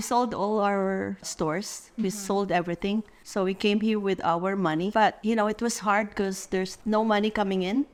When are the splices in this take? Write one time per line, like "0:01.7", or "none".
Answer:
none